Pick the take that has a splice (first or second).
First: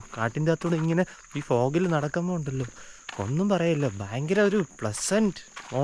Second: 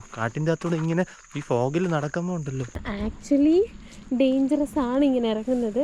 second